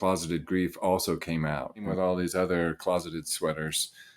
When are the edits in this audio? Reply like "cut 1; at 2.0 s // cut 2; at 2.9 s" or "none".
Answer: cut 1; at 1.9 s